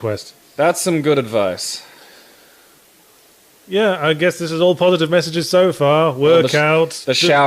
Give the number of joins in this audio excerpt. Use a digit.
1